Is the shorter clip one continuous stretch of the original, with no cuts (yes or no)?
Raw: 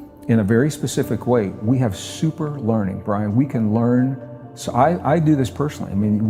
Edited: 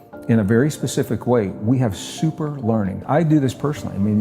no